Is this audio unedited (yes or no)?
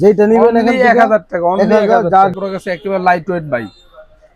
no